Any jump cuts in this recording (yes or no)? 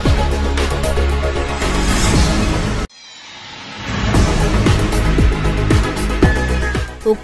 no